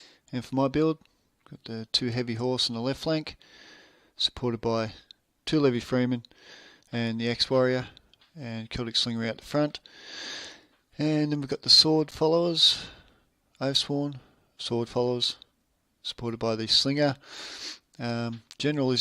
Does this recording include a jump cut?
yes; 1 cut; at 5.6 s

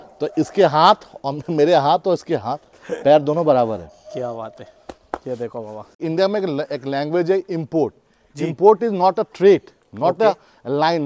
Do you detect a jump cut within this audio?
yes; 1 cut; at 5.9 s

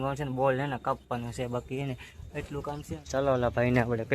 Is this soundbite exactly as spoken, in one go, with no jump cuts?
no; 1 cut; at 2.8 s

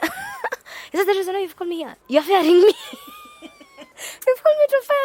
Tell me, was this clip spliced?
no; 0 cuts

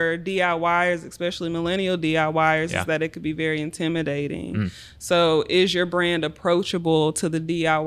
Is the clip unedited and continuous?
yes; 0 cuts

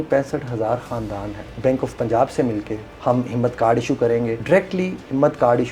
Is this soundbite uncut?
no; 3 cuts; at 1.5 s, 2.8 s, 4.4 s

